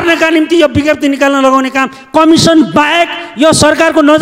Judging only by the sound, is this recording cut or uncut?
cut